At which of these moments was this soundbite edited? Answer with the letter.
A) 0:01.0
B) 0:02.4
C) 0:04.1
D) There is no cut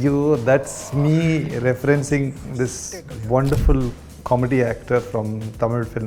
D